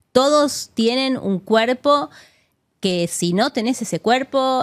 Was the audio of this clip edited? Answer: no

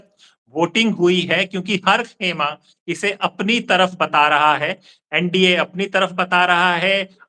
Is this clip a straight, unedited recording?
yes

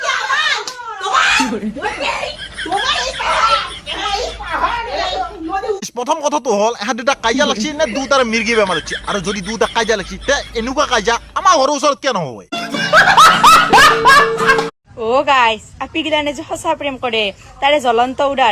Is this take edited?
no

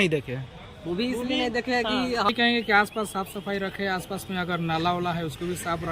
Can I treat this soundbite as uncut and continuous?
no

